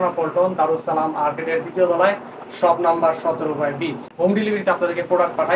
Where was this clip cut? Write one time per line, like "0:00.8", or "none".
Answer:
0:04.0